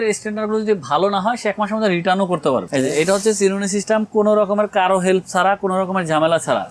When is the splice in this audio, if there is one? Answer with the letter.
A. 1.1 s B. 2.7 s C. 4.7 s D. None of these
B